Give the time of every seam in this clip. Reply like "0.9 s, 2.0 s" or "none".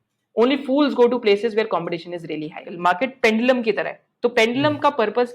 2.7 s